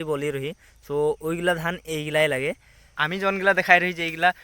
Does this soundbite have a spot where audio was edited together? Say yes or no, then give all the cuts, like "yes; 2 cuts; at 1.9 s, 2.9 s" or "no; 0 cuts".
yes; 1 cut; at 3.0 s